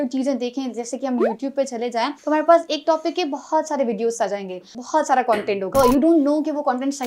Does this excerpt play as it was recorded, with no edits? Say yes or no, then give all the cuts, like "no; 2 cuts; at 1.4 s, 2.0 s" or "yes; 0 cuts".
no; 3 cuts; at 2.2 s, 4.7 s, 5.7 s